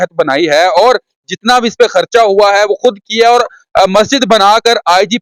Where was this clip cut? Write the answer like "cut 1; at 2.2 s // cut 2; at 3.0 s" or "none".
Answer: none